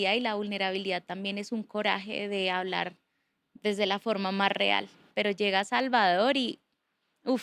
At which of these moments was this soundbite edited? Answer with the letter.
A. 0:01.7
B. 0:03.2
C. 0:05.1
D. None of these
C